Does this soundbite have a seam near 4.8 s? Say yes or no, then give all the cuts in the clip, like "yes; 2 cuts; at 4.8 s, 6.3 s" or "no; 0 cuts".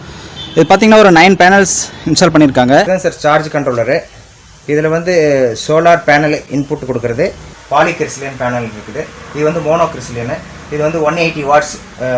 no; 2 cuts; at 2.8 s, 7.5 s